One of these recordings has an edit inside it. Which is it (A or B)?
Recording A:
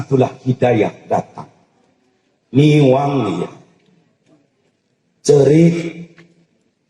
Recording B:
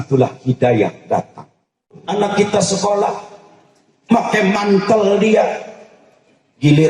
B